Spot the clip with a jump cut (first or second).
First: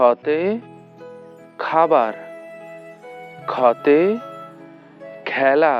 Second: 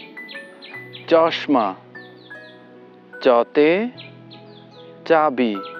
first